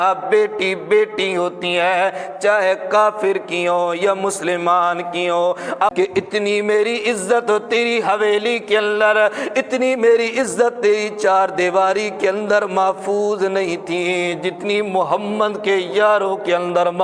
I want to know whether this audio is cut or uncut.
cut